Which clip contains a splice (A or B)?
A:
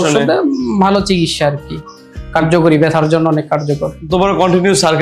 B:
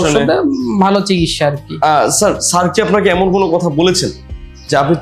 B